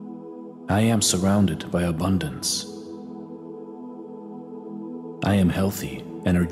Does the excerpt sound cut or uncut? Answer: cut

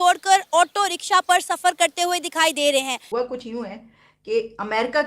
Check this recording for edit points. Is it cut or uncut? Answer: cut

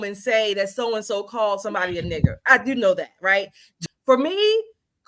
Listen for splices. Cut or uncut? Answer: cut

